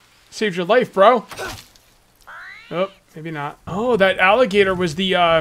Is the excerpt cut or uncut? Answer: cut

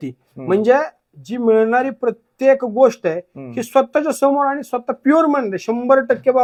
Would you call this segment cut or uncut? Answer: uncut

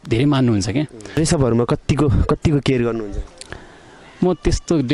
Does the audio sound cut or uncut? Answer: cut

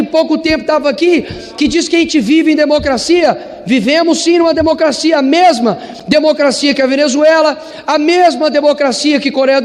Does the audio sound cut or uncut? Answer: uncut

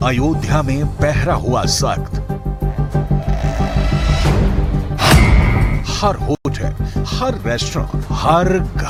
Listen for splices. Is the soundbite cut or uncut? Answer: uncut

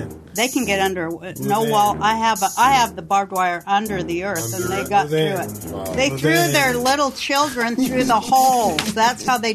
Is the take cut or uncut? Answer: uncut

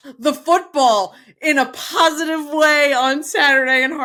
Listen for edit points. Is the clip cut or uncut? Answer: uncut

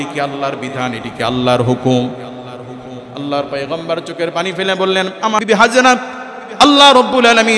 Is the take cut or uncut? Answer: cut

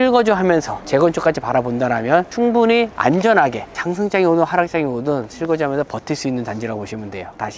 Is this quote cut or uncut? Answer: uncut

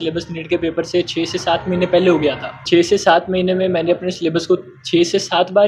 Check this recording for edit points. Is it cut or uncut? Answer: cut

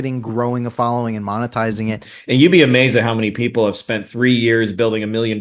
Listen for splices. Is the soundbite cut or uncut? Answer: cut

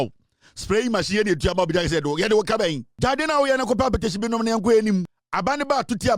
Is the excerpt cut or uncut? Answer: cut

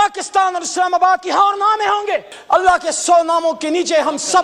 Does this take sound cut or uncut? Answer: cut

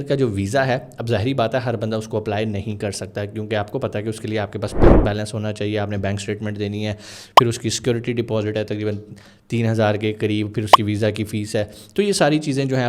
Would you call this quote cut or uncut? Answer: uncut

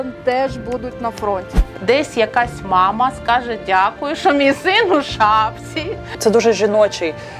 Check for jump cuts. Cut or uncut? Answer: cut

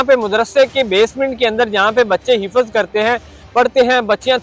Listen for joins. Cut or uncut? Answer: uncut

